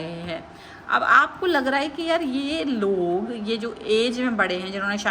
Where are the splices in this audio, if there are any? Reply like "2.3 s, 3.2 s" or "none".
none